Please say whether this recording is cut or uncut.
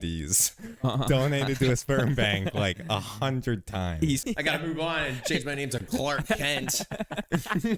cut